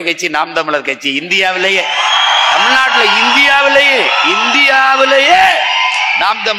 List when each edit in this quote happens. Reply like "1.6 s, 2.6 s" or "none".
none